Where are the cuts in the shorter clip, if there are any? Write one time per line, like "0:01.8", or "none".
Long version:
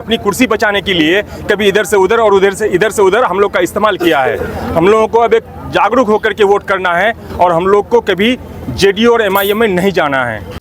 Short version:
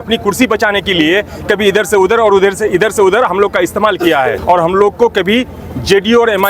0:04.4